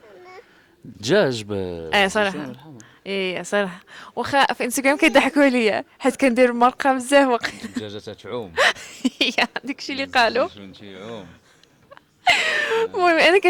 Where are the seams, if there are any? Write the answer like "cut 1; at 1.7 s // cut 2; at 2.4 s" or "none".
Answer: none

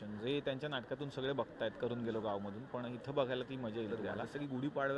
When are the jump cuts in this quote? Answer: cut 1; at 4.0 s

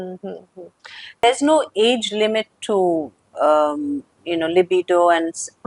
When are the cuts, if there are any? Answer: cut 1; at 1.2 s

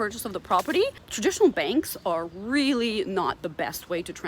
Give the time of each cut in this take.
cut 1; at 1.0 s

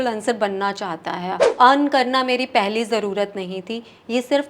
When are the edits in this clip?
cut 1; at 1.4 s

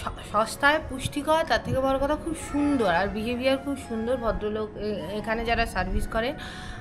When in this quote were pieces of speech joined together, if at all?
none

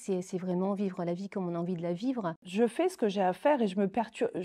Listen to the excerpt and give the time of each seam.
cut 1; at 2.4 s

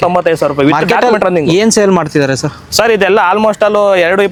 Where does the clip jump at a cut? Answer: none

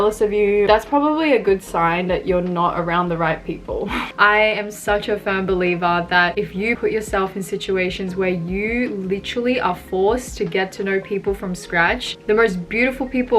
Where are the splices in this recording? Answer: cut 1; at 4.1 s // cut 2; at 6.8 s

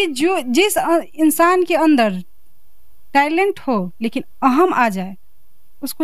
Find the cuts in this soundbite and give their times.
none

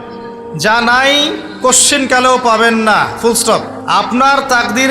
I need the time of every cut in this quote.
cut 1; at 3.7 s

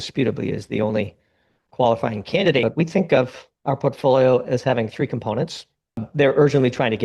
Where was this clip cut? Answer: cut 1; at 2.6 s // cut 2; at 6.1 s

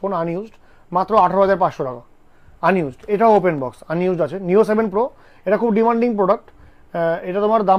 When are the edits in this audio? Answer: none

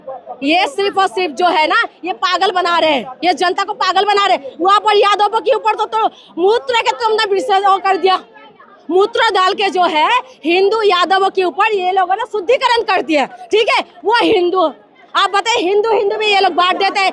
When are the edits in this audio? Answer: none

